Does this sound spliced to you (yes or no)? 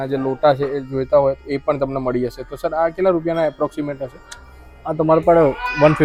no